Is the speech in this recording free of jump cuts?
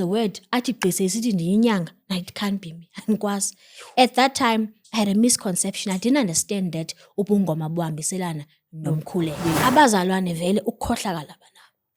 no; 1 cut; at 9.6 s

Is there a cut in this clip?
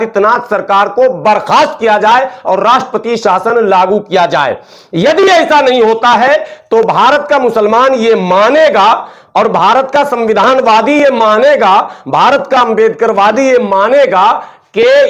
no; 0 cuts

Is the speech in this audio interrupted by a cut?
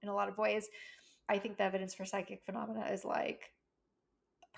yes; 1 cut; at 1.3 s

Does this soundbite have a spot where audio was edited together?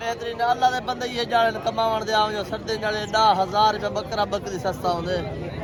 no; 0 cuts

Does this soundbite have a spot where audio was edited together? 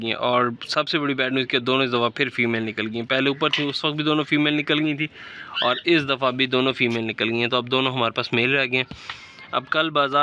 no; 0 cuts

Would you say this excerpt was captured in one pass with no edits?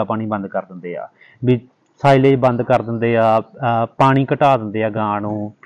yes; 0 cuts

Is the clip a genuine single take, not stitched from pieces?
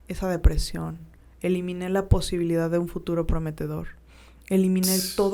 yes; 0 cuts

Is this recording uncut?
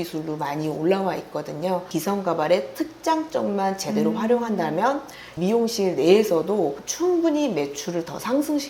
no; 3 cuts; at 1.9 s, 5.3 s, 6.8 s

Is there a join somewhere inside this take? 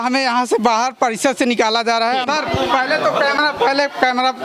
yes; 1 cut; at 2.3 s

